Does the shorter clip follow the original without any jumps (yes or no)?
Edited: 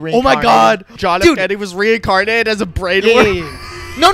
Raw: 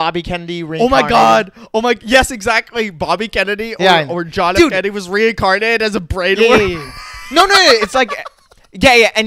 no